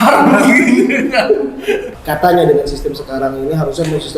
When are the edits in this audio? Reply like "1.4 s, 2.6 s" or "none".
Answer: 1.9 s